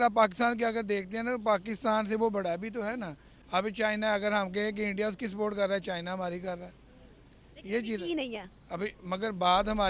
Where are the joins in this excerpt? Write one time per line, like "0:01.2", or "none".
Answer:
none